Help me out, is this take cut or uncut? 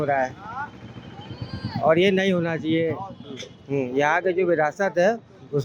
uncut